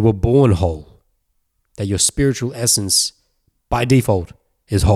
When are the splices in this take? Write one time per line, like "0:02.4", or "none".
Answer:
none